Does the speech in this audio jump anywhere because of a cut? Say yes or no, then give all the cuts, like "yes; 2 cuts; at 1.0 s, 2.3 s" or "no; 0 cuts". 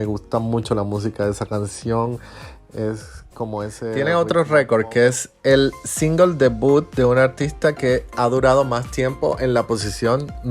yes; 1 cut; at 4.0 s